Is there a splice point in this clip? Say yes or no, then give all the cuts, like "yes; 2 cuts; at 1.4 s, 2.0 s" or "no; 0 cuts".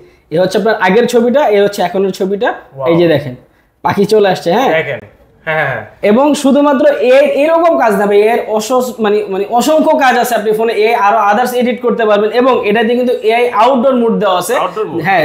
no; 0 cuts